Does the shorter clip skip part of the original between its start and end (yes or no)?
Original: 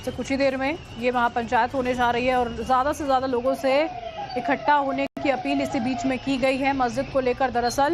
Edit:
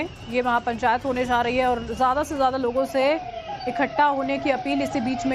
yes